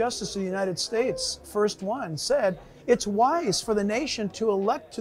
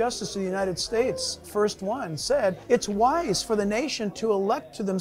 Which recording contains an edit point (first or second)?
second